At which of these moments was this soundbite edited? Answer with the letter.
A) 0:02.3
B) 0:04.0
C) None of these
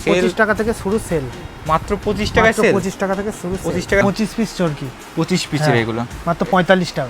B